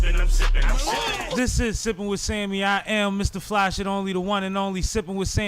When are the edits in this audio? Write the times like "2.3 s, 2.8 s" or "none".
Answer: 1.4 s